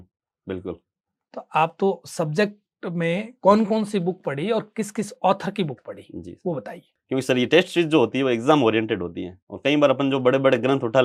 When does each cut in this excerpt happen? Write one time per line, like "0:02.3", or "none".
0:06.8